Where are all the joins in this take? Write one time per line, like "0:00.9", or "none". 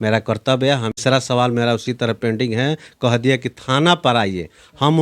0:01.0